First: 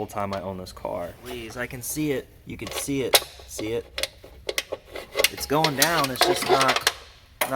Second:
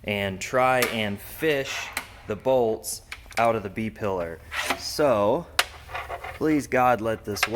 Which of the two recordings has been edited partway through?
first; 1 cut; at 1.5 s

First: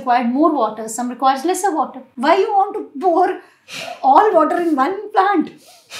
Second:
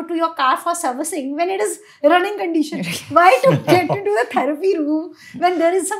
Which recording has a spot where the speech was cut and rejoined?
first; 1 cut; at 2.0 s

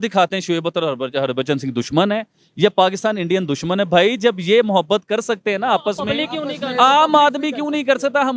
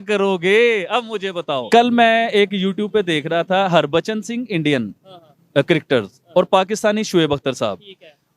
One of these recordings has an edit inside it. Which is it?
second; 1 cut; at 1.6 s

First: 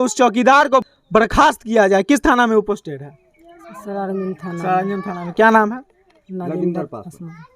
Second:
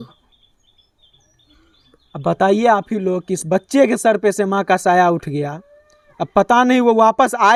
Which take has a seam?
first; 1 cut; at 1.0 s

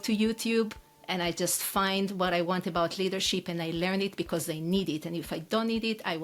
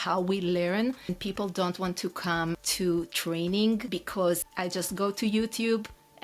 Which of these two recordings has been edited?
second; 3 cuts; at 1.1 s, 2.7 s, 4.2 s

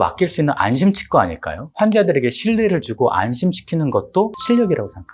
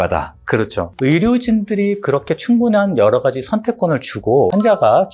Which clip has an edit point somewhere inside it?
second; 1 cut; at 0.9 s

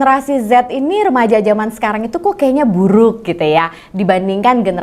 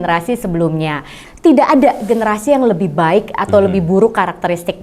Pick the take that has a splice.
second; 1 cut; at 1.2 s

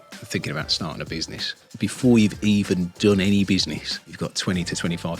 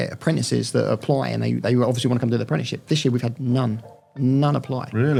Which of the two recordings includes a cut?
first; 2 cuts; at 1.6 s, 3.9 s

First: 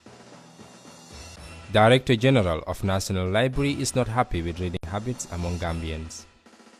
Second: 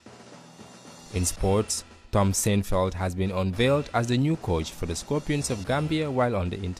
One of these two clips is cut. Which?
first; 1 cut; at 0.9 s

